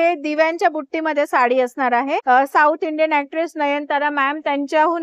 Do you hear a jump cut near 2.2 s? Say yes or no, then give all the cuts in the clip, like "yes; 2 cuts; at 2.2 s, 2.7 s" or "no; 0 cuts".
yes; 1 cut; at 2.2 s